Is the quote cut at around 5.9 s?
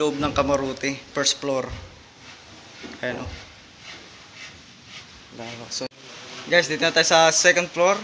yes; 1 cut; at 5.9 s

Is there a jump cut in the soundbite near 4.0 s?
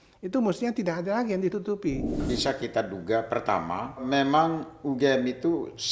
yes; 2 cuts; at 2.2 s, 4.0 s

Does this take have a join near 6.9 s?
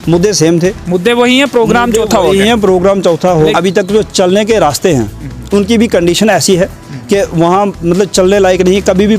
no; 1 cut; at 3.5 s

